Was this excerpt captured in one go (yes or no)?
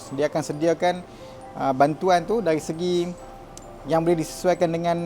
yes